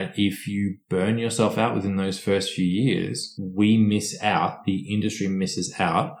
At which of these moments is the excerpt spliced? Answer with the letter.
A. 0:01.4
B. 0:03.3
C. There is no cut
B